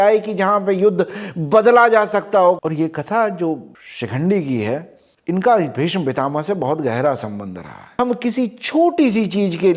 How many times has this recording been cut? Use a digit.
2